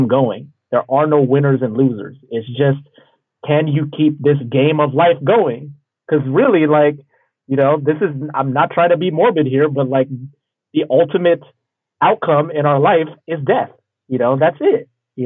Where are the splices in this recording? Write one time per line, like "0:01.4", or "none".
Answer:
none